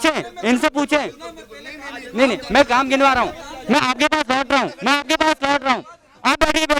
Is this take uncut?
yes; 0 cuts

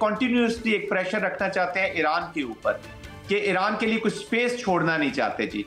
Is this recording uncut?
yes; 0 cuts

